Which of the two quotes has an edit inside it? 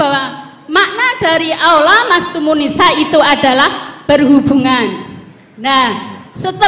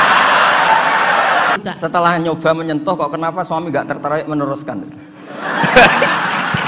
second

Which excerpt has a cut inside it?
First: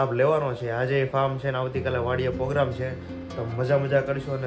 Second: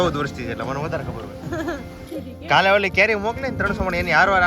second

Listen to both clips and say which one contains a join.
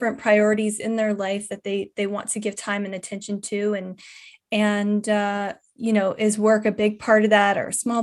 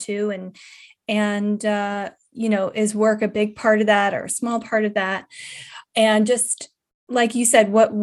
second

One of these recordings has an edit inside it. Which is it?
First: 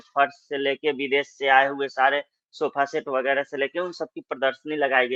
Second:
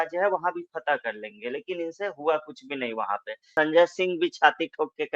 second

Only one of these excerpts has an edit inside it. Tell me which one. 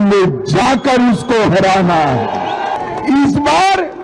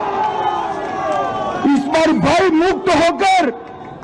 first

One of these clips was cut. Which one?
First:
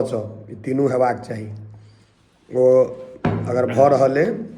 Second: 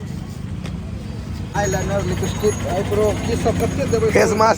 second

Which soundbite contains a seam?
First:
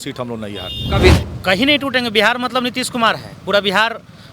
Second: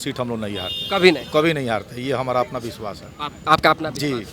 first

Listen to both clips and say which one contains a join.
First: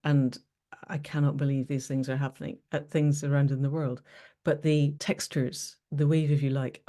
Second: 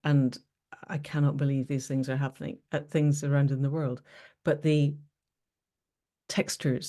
first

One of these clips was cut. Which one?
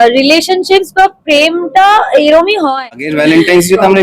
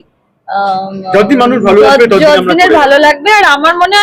first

